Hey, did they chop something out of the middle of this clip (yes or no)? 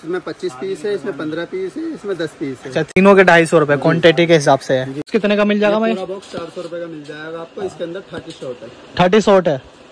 yes